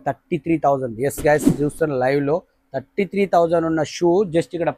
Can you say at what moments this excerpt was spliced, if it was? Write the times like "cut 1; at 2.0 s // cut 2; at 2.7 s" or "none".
none

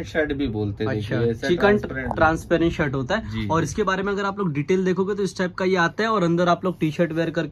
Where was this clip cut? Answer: none

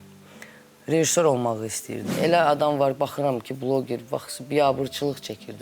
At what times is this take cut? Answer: cut 1; at 2.1 s

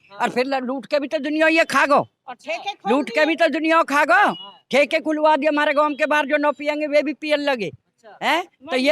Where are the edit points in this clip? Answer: none

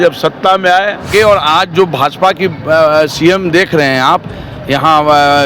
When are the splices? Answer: cut 1; at 1.1 s

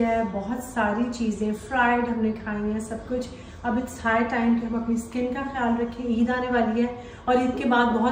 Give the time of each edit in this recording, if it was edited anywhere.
none

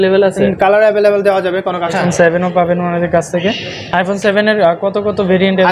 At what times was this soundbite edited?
cut 1; at 1.9 s

